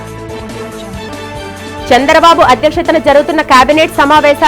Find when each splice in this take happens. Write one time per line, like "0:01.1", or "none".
0:01.1

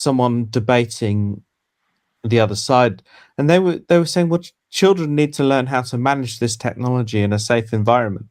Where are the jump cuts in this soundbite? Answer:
none

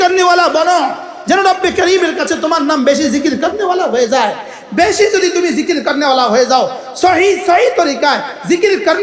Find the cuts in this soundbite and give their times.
none

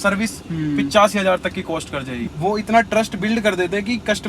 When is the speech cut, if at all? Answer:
0:02.2

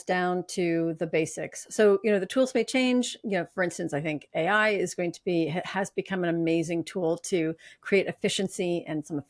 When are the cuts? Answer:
none

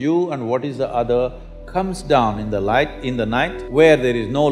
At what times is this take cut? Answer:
0:03.6

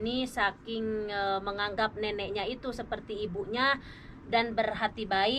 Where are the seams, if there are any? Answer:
none

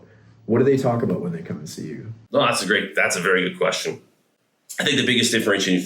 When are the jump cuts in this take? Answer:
none

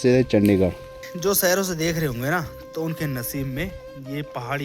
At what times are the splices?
0:01.1

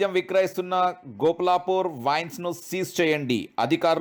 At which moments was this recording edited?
none

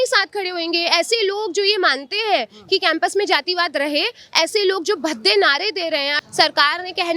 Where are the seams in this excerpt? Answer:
0:06.1

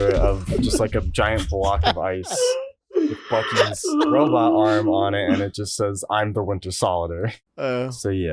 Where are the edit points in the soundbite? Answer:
0:07.4

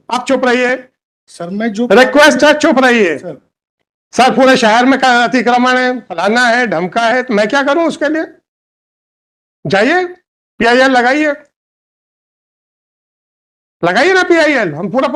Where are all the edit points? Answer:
none

